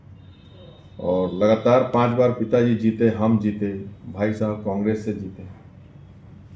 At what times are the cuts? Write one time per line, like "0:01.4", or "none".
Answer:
none